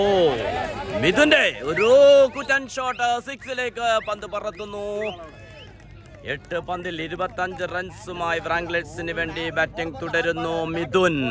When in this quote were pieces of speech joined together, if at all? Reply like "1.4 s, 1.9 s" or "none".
none